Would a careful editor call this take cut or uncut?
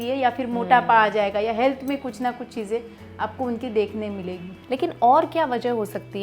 cut